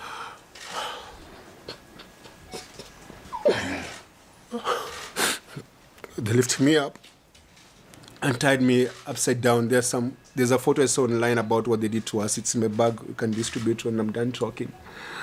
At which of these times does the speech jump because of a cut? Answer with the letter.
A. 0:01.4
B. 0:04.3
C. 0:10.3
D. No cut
D